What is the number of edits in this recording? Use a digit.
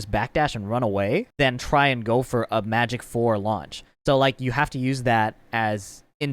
1